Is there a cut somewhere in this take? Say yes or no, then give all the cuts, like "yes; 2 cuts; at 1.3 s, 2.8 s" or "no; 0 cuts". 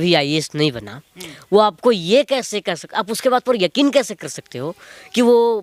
no; 0 cuts